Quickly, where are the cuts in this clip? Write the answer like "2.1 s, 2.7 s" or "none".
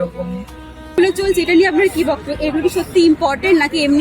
1.0 s